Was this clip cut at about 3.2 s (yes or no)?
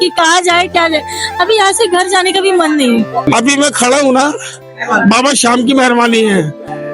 yes